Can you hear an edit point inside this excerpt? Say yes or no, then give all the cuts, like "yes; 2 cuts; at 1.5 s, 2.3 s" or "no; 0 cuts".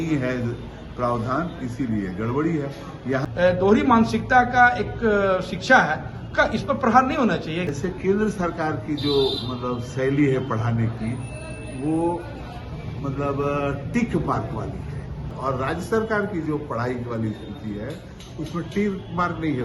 yes; 3 cuts; at 3.2 s, 7.7 s, 15.3 s